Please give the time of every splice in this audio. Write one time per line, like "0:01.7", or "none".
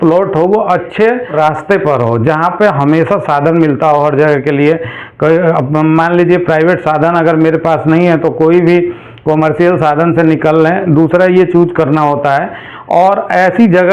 0:01.3